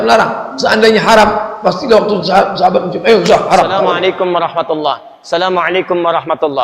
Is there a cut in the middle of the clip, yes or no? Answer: yes